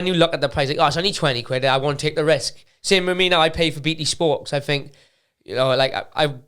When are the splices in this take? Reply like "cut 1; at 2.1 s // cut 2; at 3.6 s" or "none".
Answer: none